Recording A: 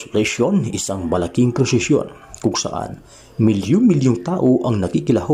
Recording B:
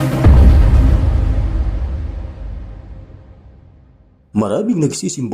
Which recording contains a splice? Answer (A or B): B